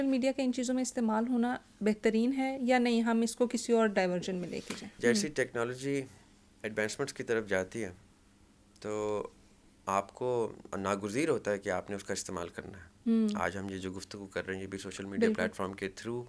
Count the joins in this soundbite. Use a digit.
1